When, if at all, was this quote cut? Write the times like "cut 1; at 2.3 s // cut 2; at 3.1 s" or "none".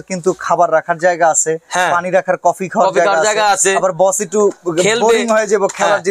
none